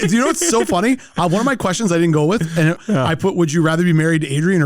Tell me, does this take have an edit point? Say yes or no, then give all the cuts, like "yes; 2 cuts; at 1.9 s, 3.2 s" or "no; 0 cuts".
yes; 1 cut; at 2.8 s